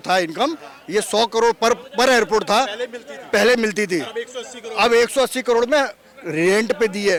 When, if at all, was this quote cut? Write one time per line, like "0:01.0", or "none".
none

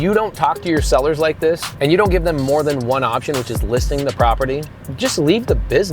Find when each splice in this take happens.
0:01.7
0:04.8

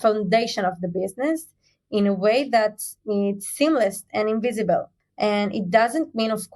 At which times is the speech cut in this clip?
0:05.0

